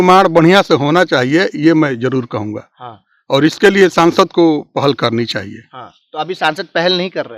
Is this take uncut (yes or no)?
yes